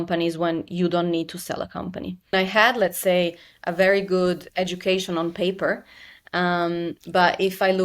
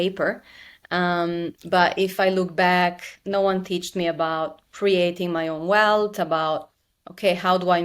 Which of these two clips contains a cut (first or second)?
first